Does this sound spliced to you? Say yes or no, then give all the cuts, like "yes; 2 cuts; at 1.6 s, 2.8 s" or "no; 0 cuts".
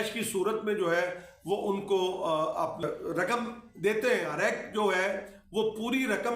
yes; 2 cuts; at 2.8 s, 4.3 s